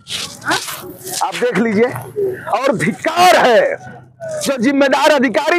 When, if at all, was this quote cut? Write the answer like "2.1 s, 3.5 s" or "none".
none